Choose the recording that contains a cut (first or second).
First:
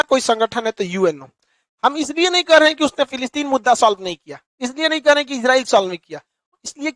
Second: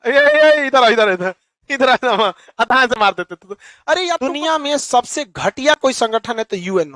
second